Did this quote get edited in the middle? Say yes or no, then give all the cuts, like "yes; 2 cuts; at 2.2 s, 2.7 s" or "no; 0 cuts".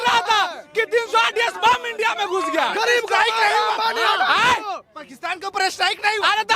no; 0 cuts